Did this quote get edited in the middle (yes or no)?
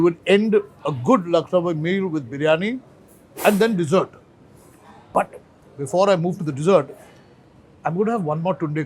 no